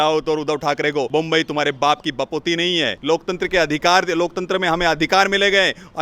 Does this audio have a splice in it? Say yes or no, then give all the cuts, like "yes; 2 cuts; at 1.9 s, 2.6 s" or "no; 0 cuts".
yes; 1 cut; at 3.0 s